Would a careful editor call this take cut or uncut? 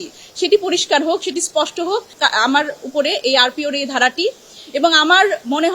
cut